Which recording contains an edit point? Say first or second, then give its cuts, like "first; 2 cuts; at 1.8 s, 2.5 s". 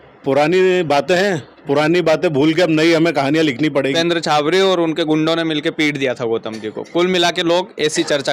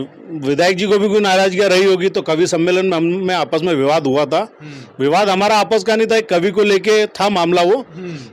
first; 1 cut; at 3.9 s